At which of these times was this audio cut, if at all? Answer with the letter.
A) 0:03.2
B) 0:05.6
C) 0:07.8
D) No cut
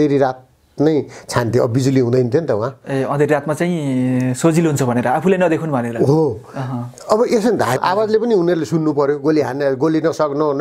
C